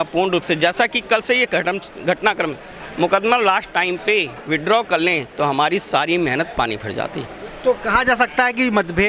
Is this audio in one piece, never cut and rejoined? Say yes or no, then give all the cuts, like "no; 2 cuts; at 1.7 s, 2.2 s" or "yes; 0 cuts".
yes; 0 cuts